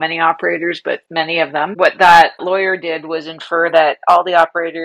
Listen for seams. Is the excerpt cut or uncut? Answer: cut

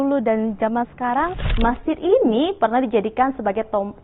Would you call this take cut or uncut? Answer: cut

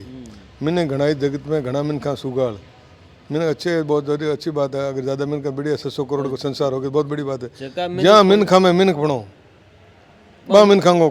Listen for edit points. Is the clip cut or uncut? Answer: uncut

